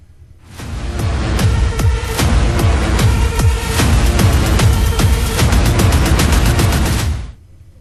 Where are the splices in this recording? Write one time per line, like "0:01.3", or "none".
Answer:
none